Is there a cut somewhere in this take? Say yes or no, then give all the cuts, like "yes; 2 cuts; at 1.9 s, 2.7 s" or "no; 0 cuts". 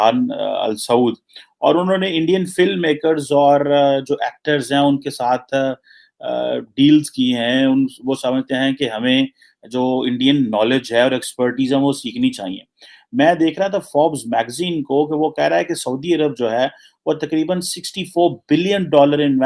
no; 0 cuts